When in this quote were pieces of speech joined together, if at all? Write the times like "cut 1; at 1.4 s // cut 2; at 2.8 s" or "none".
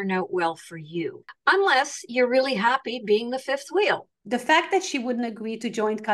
cut 1; at 1.3 s // cut 2; at 4.1 s